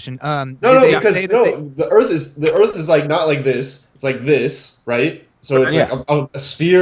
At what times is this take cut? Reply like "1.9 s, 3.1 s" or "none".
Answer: 1.7 s